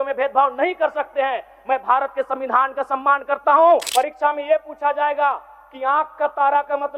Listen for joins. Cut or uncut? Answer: cut